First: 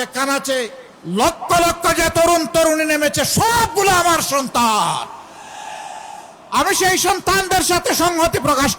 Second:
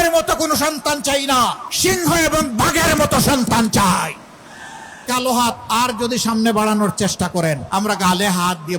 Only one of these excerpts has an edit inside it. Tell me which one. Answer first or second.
second